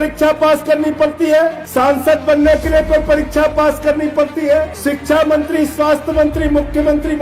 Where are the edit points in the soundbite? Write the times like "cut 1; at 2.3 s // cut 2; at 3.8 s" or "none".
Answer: cut 1; at 1.6 s // cut 2; at 4.7 s

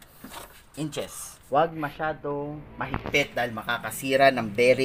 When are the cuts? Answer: cut 1; at 1.1 s

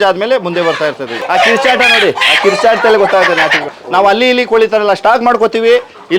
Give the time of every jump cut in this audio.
cut 1; at 1.2 s // cut 2; at 3.6 s

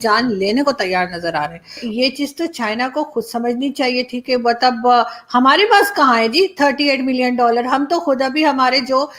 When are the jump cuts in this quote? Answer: cut 1; at 1.8 s

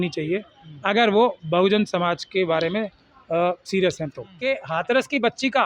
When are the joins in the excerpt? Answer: cut 1; at 4.3 s

